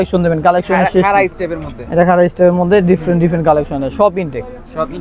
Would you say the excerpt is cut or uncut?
uncut